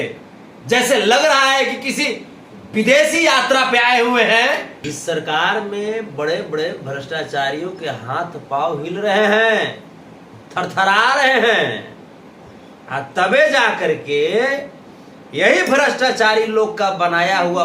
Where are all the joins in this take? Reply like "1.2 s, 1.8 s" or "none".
4.8 s